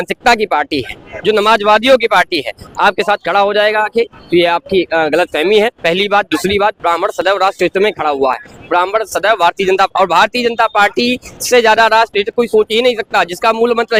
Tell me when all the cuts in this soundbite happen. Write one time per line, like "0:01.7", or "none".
none

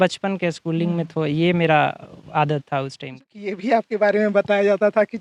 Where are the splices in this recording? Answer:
0:03.5

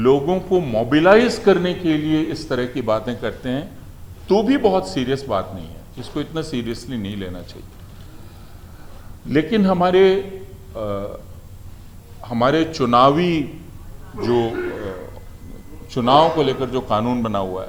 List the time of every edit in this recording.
none

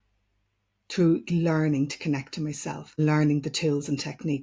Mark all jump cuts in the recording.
0:03.0

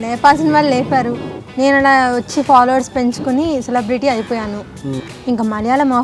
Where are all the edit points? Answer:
0:01.4
0:04.9

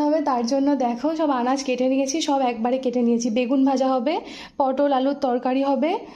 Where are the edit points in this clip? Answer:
none

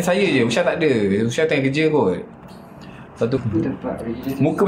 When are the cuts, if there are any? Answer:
0:03.4

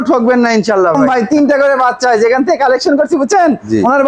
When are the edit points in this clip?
0:01.0

